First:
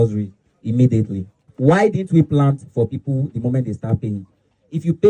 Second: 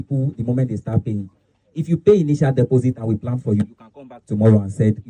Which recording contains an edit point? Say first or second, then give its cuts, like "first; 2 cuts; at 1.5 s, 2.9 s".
first; 1 cut; at 1.4 s